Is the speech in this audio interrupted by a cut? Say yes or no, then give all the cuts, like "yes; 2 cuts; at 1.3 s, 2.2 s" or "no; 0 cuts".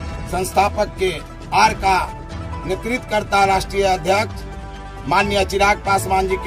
no; 0 cuts